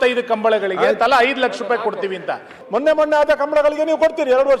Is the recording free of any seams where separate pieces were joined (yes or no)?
no